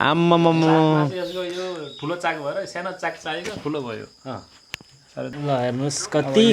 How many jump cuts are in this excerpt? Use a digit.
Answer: 1